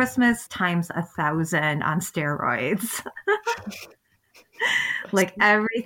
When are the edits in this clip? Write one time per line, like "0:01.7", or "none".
none